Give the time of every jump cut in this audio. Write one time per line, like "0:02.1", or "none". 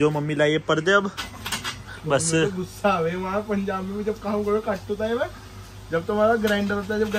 0:01.3